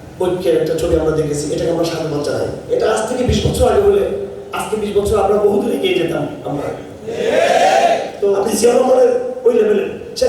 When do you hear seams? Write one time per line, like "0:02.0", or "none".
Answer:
0:02.6
0:08.5